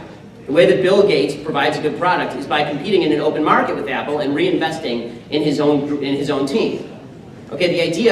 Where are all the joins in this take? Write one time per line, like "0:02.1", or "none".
0:04.5